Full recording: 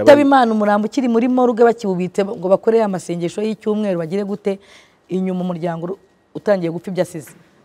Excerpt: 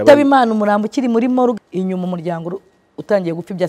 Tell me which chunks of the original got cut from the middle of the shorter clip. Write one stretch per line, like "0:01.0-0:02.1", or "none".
0:01.6-0:04.9